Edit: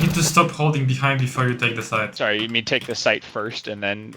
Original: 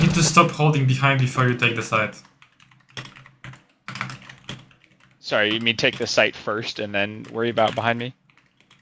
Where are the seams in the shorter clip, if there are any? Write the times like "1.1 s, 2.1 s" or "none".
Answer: 2.1 s